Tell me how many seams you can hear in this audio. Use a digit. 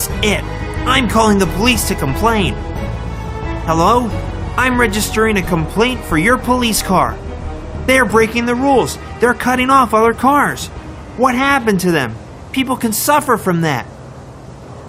1